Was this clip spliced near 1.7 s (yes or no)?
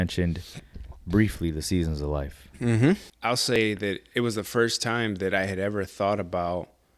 no